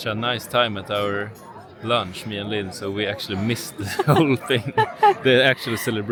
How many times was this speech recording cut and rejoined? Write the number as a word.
zero